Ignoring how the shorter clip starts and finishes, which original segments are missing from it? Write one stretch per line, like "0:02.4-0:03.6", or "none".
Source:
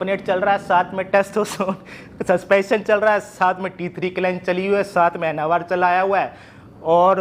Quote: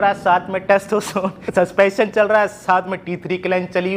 0:01.8-0:02.1